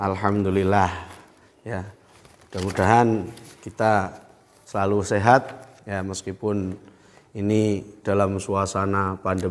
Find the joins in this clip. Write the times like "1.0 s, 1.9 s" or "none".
none